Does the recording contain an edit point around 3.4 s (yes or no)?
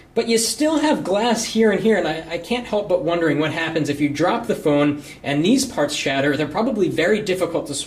yes